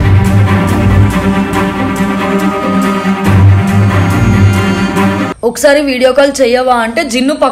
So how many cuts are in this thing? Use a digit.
1